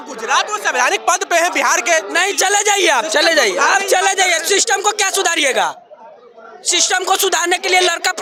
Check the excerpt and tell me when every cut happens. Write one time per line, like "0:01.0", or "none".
none